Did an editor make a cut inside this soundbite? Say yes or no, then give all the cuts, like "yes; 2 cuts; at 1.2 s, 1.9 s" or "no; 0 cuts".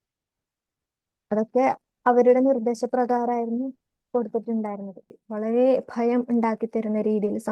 yes; 1 cut; at 5.2 s